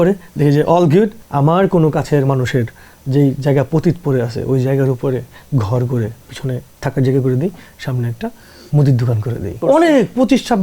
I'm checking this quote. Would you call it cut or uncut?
cut